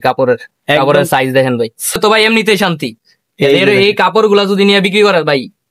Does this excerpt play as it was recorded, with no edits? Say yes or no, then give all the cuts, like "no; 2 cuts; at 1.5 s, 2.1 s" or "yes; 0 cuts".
no; 1 cut; at 2.0 s